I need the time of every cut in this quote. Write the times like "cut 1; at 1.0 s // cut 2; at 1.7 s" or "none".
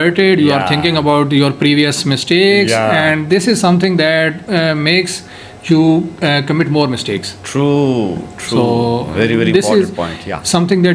none